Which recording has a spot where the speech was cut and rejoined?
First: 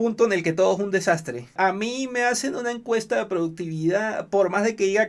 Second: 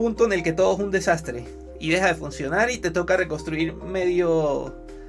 first; 1 cut; at 1.5 s

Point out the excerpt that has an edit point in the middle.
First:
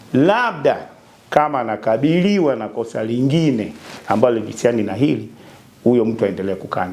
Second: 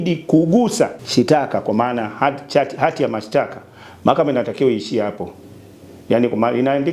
second; 1 cut; at 1.0 s

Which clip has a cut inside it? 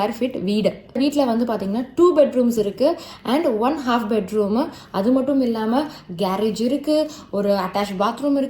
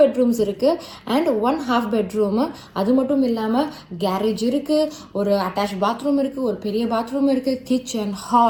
first; 1 cut; at 1.0 s

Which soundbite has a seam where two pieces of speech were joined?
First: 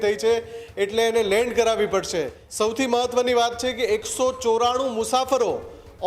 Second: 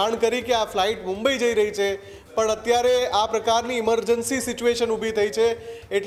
first; 1 cut; at 2.4 s

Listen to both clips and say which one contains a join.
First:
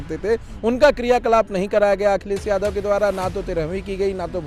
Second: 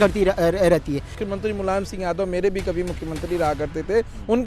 second; 1 cut; at 1.2 s

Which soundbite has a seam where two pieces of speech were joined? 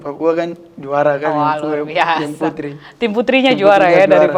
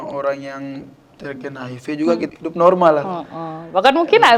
second; 1 cut; at 2.3 s

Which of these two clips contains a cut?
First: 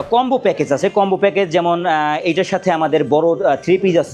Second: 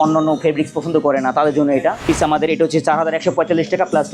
second; 1 cut; at 2.0 s

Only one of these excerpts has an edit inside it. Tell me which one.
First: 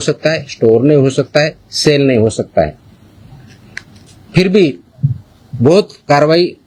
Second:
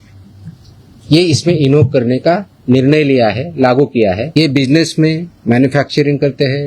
second; 1 cut; at 4.2 s

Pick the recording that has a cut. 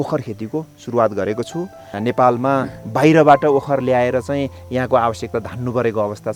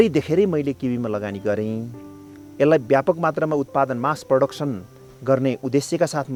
first; 1 cut; at 1.8 s

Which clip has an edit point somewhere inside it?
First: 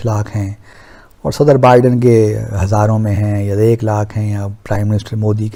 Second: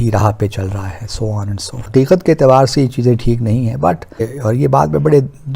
second; 2 cuts; at 1.9 s, 4.1 s

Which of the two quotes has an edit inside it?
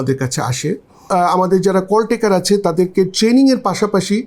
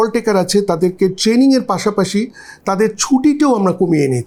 first; 1 cut; at 1.0 s

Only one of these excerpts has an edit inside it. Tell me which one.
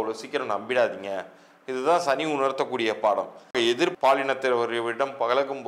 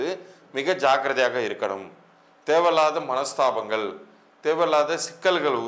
first; 1 cut; at 3.5 s

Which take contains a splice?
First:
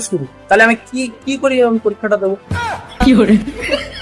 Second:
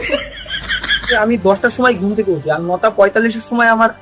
second; 1 cut; at 1.1 s

